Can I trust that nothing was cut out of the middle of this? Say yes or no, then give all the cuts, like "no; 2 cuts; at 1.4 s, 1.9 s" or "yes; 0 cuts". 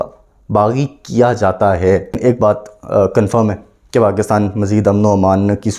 no; 1 cut; at 2.2 s